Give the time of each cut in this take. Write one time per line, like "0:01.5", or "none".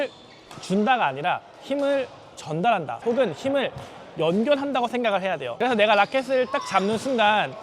0:05.5